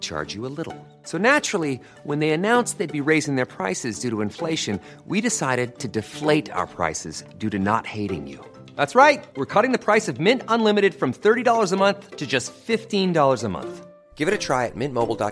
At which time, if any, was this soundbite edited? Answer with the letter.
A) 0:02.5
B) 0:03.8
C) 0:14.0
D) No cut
D